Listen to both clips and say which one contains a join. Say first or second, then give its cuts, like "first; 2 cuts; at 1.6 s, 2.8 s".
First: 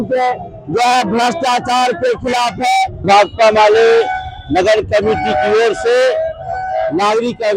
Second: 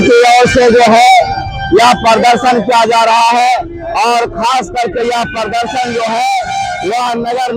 first; 1 cut; at 3.1 s